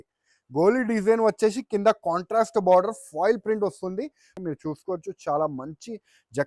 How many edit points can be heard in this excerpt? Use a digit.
1